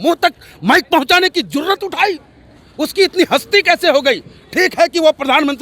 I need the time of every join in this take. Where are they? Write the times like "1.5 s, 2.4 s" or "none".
none